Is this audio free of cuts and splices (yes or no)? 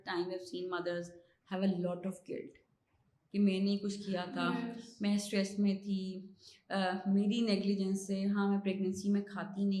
yes